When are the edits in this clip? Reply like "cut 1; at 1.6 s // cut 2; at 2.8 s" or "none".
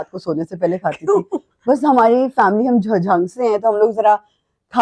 none